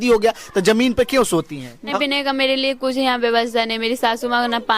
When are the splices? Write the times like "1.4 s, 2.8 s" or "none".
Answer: 1.9 s